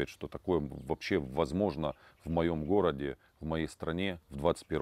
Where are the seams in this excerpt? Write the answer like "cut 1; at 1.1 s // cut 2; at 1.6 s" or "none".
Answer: none